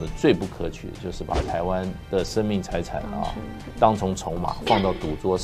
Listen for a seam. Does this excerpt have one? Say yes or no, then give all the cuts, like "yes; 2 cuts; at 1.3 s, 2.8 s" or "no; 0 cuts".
no; 0 cuts